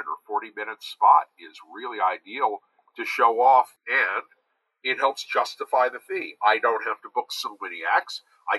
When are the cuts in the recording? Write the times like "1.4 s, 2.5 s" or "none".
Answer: 3.8 s

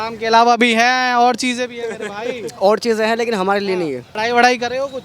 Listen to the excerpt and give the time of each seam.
4.1 s

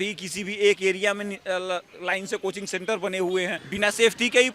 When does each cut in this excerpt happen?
3.6 s

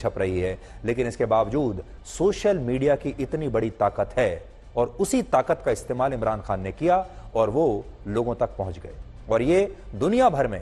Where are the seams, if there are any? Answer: none

